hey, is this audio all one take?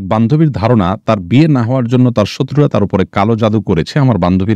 yes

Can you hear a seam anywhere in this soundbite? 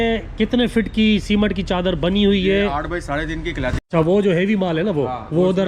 yes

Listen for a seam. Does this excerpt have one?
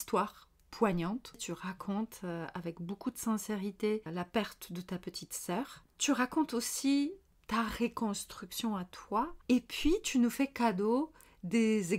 yes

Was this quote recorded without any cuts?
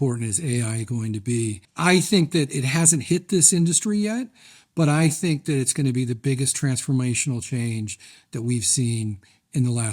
no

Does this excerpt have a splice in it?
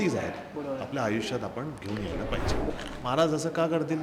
yes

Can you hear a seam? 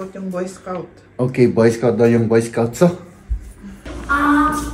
no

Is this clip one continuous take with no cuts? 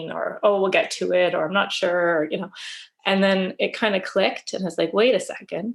yes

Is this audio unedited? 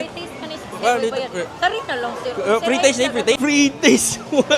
no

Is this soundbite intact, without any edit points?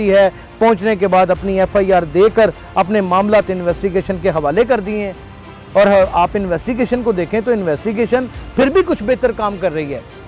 yes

